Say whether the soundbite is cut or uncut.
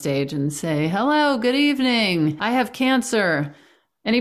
cut